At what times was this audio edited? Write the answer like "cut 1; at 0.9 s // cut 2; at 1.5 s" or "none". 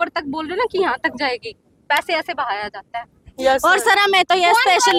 none